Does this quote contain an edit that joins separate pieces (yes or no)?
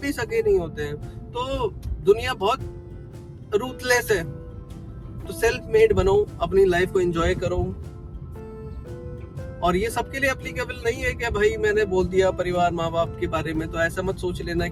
no